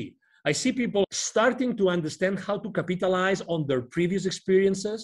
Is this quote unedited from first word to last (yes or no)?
no